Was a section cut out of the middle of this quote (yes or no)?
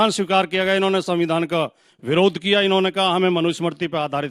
no